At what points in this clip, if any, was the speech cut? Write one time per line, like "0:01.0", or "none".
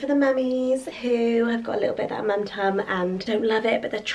0:03.2